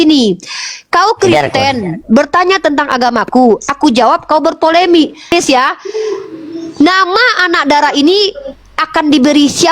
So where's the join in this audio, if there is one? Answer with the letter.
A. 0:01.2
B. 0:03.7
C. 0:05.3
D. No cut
C